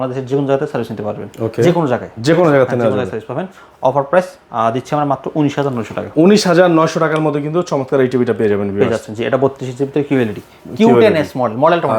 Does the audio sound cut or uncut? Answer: uncut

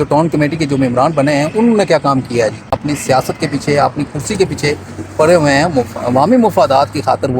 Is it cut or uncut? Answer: cut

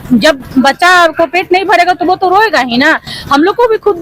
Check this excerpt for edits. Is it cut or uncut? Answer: uncut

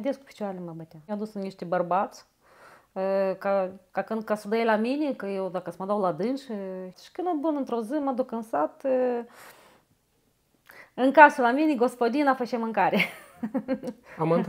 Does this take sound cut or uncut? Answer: cut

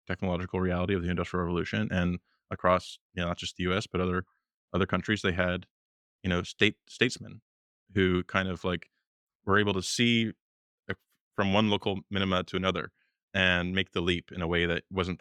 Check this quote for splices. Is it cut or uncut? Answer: uncut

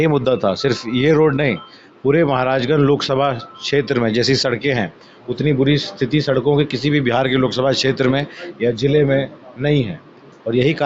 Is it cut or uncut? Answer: uncut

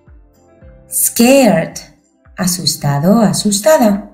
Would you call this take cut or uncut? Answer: cut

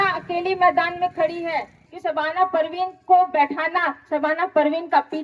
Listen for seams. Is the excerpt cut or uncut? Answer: cut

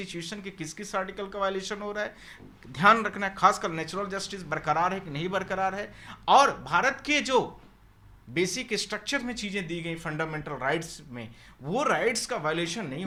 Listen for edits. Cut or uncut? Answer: uncut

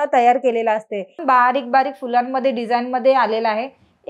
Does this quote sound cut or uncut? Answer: cut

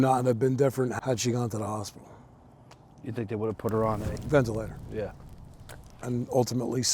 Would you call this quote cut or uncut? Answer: cut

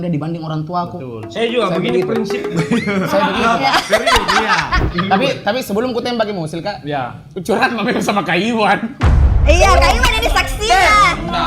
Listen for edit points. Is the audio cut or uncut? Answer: cut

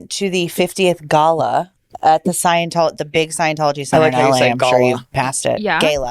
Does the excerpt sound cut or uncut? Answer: cut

